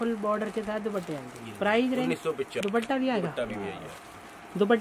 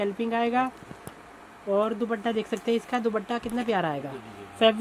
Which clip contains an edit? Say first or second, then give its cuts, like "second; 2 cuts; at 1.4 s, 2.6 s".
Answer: first; 1 cut; at 2.6 s